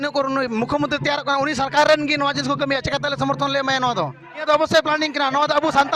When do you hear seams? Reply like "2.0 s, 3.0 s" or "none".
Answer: 4.4 s